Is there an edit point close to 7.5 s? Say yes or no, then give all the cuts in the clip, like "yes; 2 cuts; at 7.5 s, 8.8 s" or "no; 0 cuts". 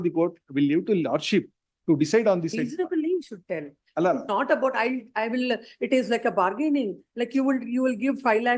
no; 0 cuts